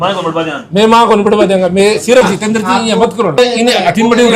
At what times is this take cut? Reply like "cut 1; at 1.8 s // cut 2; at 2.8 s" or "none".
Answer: cut 1; at 2.2 s // cut 2; at 3.4 s